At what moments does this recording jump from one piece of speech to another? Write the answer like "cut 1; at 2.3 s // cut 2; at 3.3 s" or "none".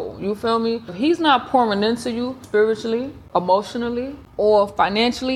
cut 1; at 0.9 s // cut 2; at 2.4 s // cut 3; at 3.2 s // cut 4; at 4.2 s